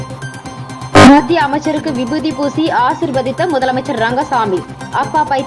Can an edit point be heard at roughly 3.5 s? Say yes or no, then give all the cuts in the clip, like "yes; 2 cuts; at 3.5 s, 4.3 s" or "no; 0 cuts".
no; 1 cut; at 0.9 s